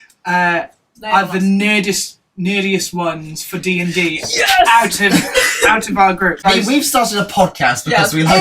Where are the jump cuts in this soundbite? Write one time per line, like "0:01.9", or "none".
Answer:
0:06.4